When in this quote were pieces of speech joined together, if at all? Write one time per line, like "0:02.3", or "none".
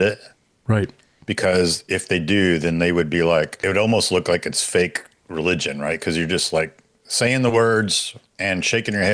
0:03.6